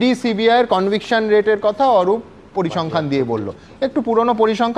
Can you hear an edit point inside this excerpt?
no; 0 cuts

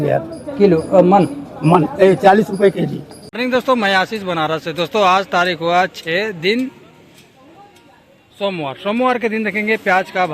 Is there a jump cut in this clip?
yes; 1 cut; at 3.4 s

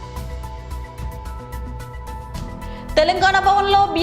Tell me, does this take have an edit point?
no; 0 cuts

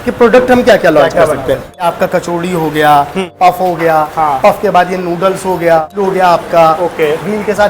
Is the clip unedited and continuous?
no; 3 cuts; at 1.7 s, 3.3 s, 5.9 s

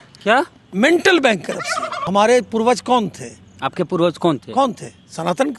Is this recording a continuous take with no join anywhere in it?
no; 1 cut; at 2.0 s

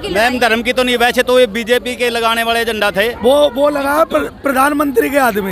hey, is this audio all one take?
no; 1 cut; at 3.2 s

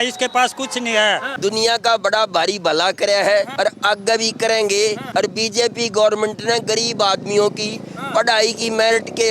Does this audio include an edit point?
yes; 3 cuts; at 1.3 s, 3.5 s, 5.0 s

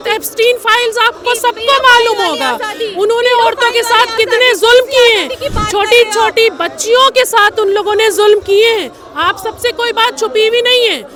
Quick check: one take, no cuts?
yes; 0 cuts

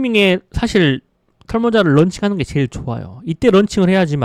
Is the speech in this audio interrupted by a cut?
no; 0 cuts

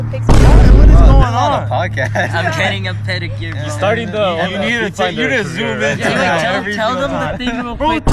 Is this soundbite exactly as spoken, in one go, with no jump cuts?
yes; 0 cuts

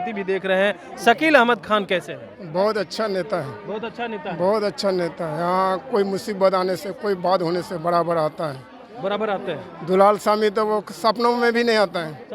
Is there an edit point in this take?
no; 0 cuts

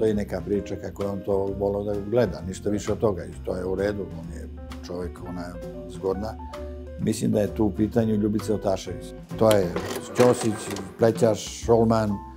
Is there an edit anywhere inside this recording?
yes; 1 cut; at 9.0 s

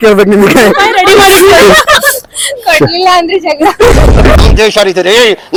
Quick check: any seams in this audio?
no; 0 cuts

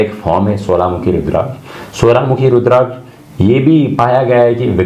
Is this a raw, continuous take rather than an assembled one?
yes; 0 cuts

